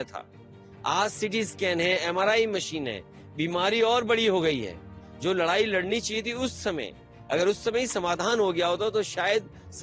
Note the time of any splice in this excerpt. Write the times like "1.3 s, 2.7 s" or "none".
none